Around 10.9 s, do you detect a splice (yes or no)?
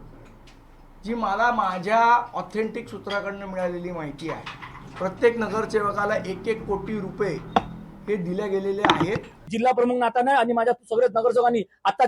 no